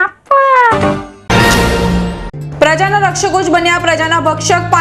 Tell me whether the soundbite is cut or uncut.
cut